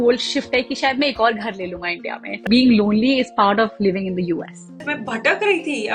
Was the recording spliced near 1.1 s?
no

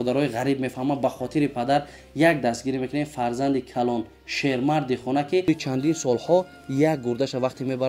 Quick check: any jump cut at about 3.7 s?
no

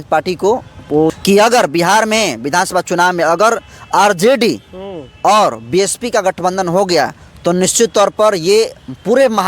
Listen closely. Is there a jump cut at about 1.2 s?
yes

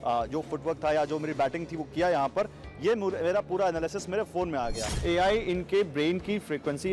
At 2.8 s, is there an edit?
no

